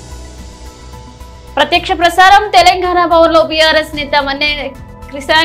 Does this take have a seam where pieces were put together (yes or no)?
no